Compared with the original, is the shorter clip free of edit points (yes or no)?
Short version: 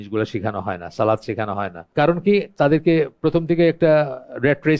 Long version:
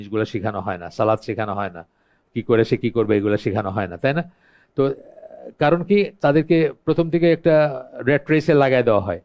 no